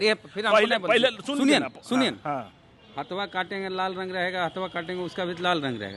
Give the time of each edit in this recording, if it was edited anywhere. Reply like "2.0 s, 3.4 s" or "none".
none